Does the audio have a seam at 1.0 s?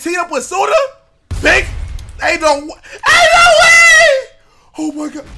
no; 0 cuts

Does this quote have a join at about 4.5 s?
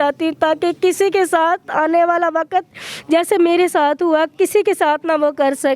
no; 0 cuts

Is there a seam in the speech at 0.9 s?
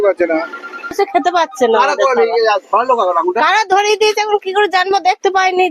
yes; 1 cut; at 0.9 s

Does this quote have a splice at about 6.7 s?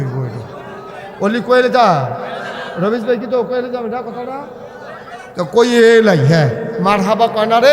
yes; 1 cut; at 6.7 s

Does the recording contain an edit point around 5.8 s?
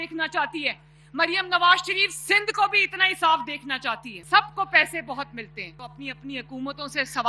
yes; 2 cuts; at 4.1 s, 5.8 s

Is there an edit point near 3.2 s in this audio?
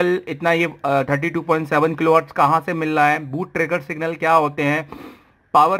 no; 0 cuts

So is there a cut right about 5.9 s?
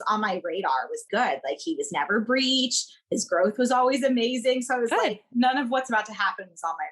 no; 1 cut; at 1.0 s

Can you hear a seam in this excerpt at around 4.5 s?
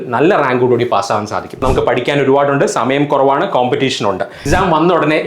yes; 2 cuts; at 1.6 s, 4.5 s

